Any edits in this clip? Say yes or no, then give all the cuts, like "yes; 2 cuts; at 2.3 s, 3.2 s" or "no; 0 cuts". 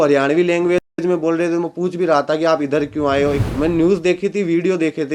yes; 1 cut; at 3.4 s